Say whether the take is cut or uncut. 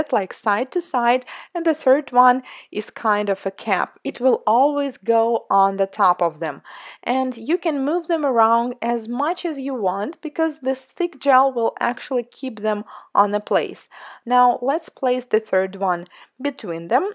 cut